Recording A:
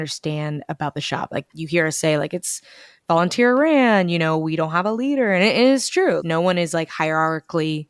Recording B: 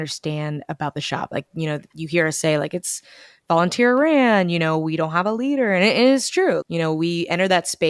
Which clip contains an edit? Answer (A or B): A